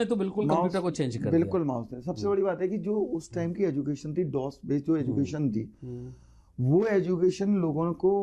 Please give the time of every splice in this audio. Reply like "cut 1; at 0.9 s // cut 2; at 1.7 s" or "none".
none